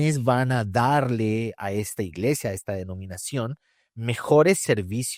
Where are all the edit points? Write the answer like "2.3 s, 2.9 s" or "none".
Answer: none

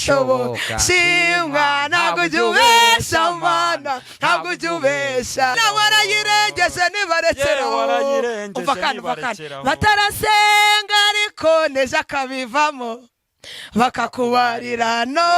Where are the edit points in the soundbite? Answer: 5.5 s

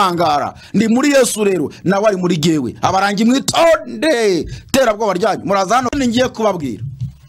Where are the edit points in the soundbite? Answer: 5.9 s

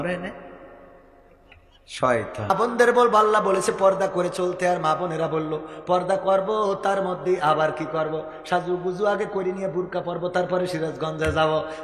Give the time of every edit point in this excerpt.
2.5 s

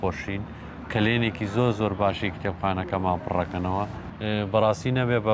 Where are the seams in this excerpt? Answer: 4.0 s

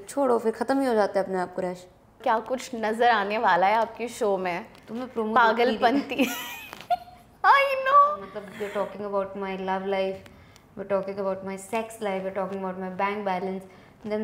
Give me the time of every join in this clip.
2.2 s, 8.4 s

